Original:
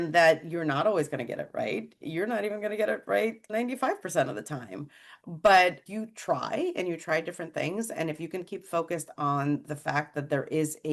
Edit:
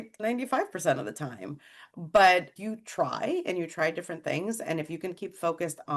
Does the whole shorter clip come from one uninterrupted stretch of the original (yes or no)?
yes